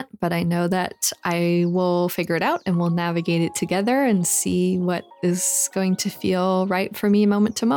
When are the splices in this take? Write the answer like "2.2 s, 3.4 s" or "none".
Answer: none